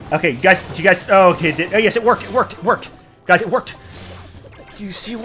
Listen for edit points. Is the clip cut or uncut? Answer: uncut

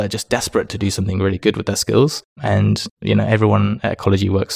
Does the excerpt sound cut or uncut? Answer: uncut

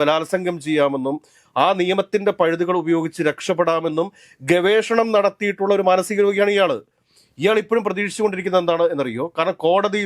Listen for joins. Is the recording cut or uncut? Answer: uncut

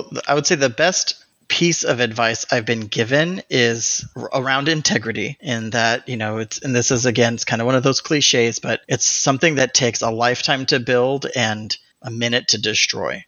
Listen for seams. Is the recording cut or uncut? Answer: cut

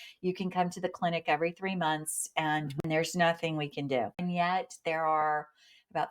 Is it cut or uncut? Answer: cut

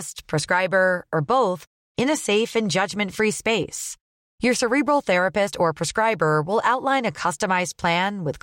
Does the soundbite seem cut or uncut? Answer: uncut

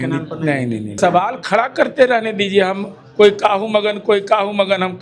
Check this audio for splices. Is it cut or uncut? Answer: cut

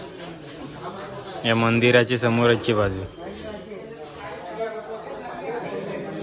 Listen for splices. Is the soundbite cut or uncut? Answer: uncut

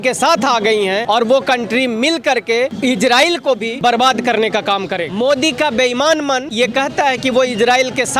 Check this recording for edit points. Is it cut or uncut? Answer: cut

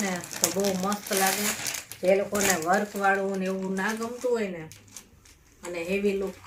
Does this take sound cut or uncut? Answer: uncut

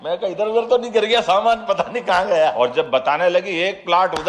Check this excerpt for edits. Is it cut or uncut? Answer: cut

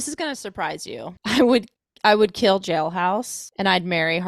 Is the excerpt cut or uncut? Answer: cut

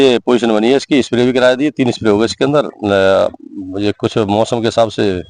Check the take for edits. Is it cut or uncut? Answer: uncut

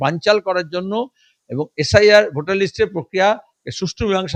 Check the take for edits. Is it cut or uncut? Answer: uncut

